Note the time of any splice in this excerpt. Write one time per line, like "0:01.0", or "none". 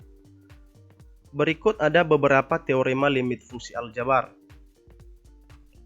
0:01.3
0:04.3